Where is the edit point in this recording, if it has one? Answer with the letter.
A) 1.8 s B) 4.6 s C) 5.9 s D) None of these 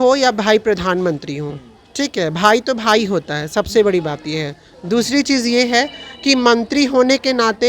D